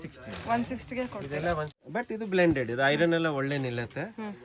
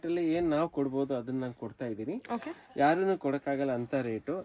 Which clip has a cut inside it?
first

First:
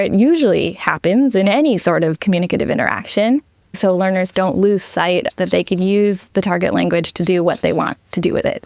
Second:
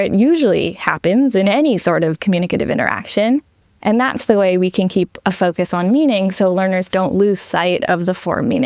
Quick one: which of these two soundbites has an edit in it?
first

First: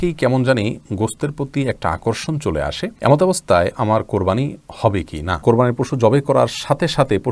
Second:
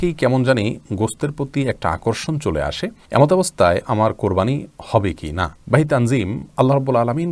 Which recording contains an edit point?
first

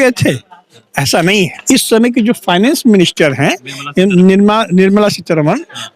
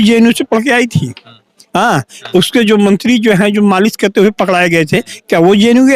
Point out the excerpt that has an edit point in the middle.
first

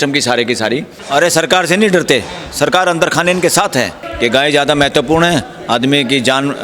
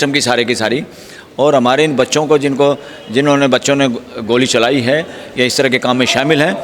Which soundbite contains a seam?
first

